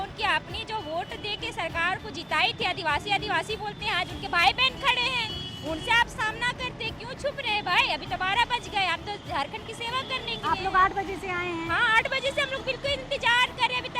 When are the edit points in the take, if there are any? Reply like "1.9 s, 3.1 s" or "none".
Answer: none